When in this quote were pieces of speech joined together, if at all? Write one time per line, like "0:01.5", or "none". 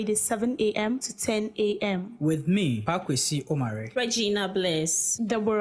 none